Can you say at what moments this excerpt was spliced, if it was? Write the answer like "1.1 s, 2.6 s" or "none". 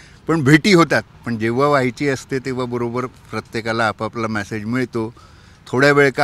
none